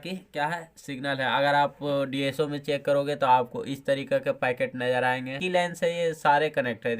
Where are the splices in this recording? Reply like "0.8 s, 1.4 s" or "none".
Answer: 5.4 s